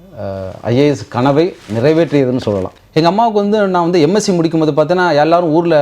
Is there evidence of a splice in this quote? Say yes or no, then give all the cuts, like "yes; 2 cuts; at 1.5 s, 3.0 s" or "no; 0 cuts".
yes; 1 cut; at 2.8 s